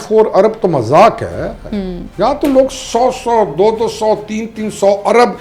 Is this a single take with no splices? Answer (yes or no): yes